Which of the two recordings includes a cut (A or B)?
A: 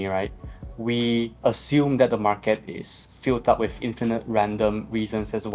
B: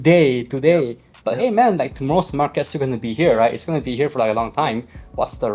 A